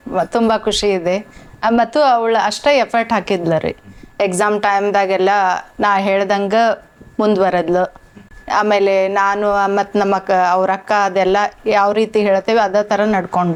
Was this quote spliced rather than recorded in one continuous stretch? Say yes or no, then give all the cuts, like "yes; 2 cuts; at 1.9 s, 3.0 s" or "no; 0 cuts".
no; 0 cuts